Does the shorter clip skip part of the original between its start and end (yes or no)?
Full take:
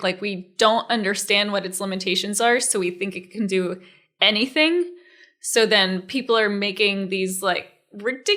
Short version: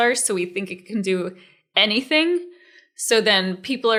no